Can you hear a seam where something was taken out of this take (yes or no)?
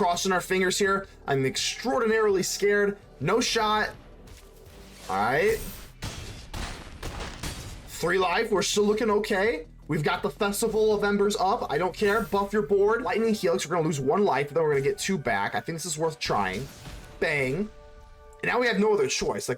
yes